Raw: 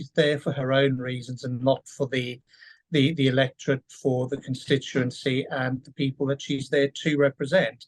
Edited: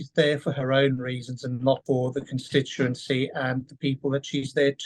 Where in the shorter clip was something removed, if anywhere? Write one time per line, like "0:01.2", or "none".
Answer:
0:01.8